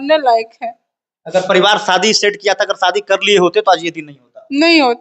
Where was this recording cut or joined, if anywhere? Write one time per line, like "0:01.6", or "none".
none